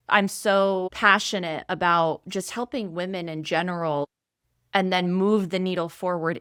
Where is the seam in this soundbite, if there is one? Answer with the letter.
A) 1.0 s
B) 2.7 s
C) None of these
C